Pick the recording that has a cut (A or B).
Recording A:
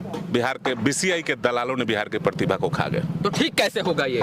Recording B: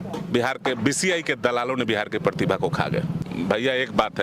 B